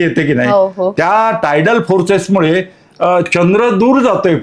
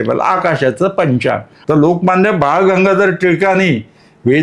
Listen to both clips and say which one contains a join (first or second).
second